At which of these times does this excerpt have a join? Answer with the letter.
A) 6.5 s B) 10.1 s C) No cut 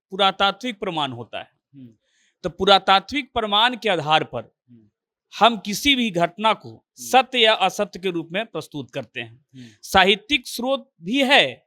C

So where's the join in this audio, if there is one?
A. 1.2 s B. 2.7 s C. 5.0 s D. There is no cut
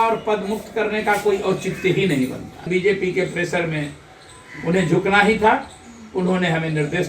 B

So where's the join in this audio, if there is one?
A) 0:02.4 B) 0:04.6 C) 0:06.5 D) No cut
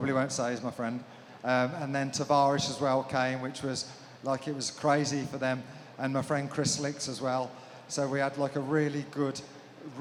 D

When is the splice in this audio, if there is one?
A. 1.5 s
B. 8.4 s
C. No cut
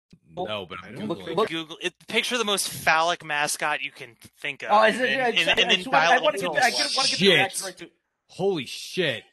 A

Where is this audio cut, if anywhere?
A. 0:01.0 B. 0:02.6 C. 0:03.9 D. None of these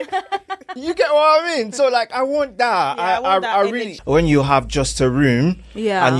C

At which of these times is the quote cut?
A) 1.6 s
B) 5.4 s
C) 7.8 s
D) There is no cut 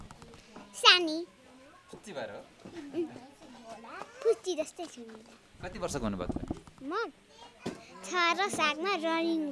D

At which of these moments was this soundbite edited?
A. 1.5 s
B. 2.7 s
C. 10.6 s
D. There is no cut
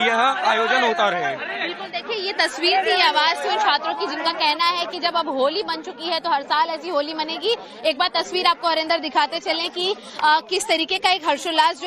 C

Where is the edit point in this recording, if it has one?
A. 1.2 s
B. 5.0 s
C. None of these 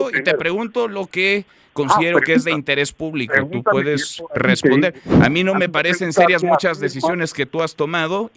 B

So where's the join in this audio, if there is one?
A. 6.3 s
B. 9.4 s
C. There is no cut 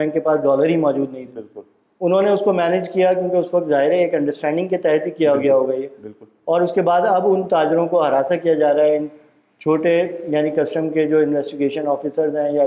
C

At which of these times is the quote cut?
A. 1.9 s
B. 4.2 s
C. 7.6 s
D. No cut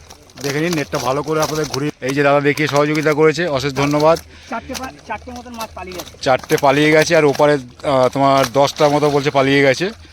A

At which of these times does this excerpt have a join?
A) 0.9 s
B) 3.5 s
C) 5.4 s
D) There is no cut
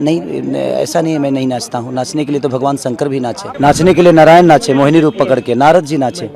B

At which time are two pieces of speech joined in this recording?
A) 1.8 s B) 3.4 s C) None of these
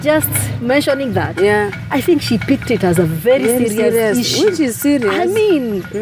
A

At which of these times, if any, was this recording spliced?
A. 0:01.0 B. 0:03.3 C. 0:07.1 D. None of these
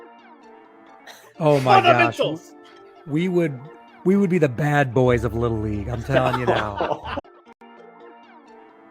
C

